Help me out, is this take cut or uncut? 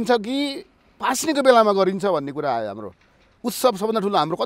uncut